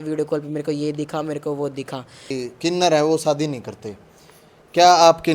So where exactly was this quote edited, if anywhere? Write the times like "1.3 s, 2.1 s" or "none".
2.3 s

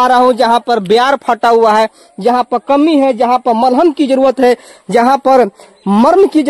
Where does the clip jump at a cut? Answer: none

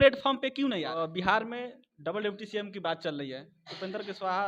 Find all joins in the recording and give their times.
1.0 s

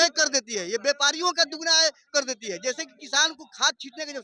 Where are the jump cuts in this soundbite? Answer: none

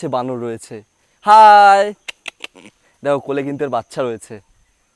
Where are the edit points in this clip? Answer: none

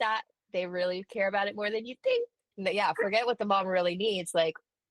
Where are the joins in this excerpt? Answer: 2.5 s

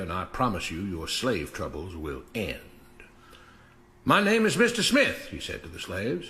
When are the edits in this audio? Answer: 2.1 s

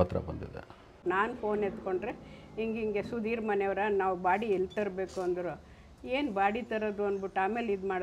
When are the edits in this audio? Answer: 1.0 s

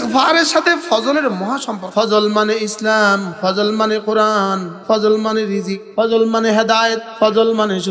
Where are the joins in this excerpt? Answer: 1.8 s, 3.3 s, 4.7 s, 5.8 s, 7.1 s

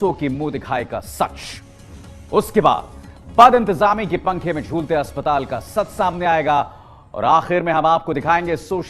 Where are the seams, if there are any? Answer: none

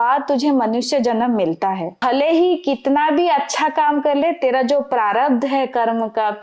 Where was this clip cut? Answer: 1.9 s

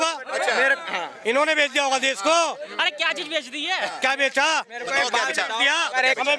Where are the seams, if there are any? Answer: none

